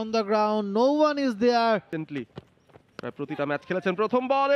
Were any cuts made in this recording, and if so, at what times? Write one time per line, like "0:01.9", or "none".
0:01.9